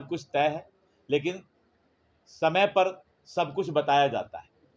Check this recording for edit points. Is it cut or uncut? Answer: uncut